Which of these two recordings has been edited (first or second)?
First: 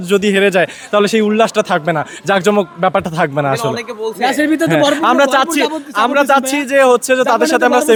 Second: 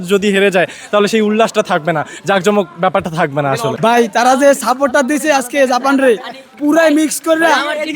second